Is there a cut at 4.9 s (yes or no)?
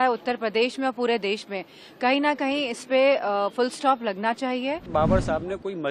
yes